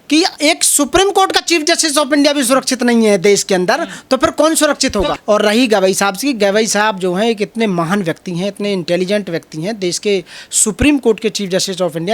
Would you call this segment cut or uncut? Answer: cut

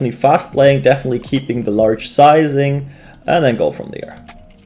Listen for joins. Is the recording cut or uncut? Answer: uncut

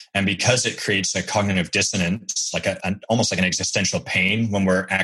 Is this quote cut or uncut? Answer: cut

